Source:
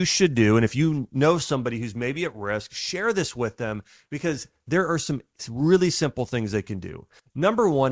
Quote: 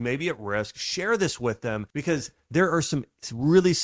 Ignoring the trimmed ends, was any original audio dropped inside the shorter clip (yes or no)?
yes